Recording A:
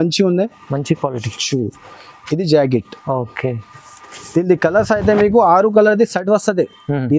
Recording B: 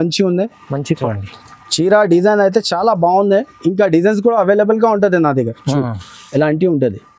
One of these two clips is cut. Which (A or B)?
B